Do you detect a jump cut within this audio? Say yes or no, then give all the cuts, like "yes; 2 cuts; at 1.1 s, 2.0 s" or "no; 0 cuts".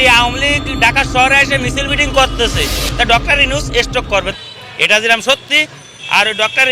yes; 1 cut; at 4.3 s